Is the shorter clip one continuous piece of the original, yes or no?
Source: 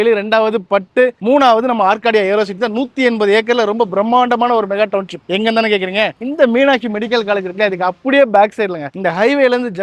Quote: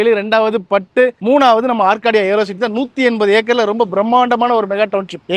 yes